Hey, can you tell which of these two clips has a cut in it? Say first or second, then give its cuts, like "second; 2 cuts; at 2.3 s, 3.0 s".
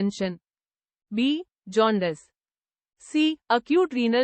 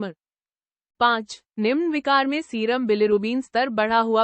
second; 1 cut; at 1.1 s